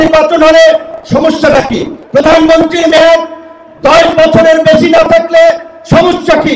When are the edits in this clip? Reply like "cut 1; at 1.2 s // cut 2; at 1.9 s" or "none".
cut 1; at 1.9 s